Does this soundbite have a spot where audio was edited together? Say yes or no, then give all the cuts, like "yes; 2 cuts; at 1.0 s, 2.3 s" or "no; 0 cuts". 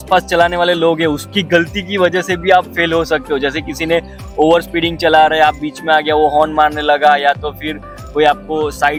no; 0 cuts